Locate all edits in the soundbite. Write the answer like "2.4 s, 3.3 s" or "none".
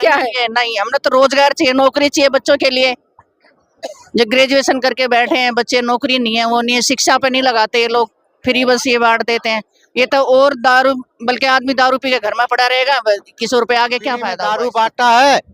14.4 s